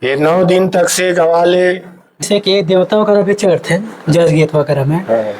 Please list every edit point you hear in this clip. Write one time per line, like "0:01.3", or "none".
0:02.2